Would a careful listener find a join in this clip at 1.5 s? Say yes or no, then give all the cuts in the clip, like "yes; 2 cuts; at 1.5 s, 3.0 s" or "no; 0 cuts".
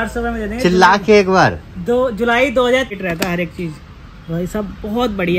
no; 1 cut; at 2.9 s